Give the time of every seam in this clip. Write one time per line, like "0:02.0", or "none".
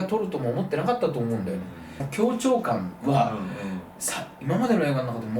0:02.1